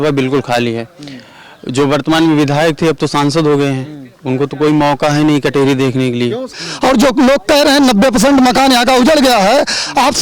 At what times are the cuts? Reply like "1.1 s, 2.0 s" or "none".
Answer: 6.6 s